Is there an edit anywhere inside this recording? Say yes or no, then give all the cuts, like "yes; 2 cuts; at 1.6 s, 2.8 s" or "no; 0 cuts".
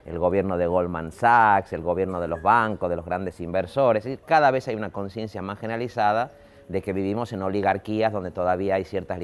no; 0 cuts